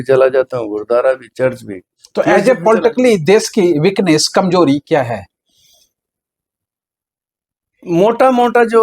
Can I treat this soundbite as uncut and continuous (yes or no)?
yes